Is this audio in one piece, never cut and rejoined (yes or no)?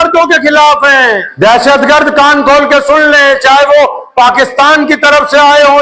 no